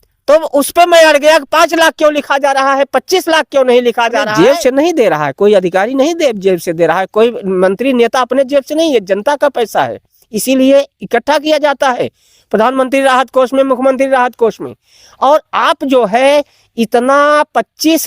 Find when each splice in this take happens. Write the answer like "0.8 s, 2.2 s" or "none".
4.3 s